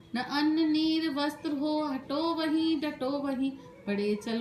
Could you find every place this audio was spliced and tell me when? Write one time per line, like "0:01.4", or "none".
none